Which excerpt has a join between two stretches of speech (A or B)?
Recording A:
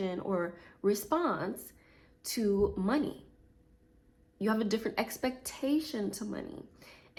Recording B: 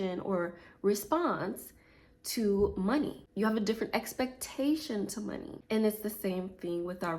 B